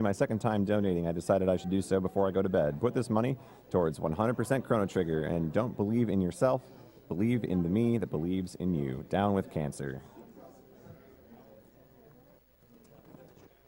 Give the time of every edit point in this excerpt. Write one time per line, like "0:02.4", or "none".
0:04.5